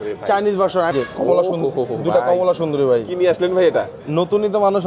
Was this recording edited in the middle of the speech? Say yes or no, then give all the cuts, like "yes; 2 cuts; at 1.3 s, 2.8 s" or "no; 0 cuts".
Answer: yes; 1 cut; at 0.9 s